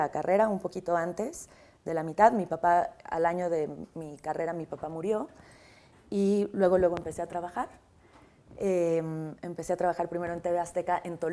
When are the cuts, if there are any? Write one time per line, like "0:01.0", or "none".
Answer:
none